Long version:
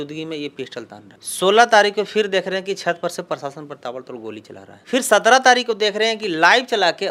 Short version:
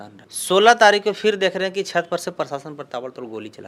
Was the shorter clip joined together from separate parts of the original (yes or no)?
no